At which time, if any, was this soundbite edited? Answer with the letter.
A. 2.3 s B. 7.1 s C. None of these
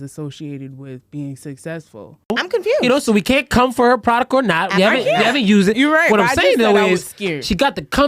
A